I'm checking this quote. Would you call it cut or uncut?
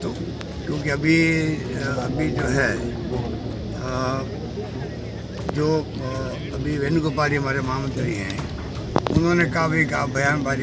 uncut